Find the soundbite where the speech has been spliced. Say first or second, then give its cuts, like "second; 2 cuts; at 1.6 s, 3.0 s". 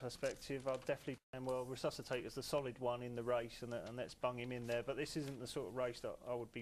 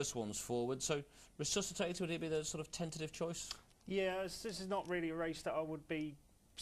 first; 1 cut; at 1.3 s